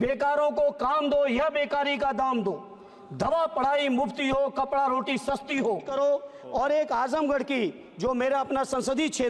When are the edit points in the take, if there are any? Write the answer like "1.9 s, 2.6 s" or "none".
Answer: 5.9 s